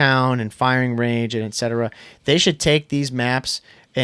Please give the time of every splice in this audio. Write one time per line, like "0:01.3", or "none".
none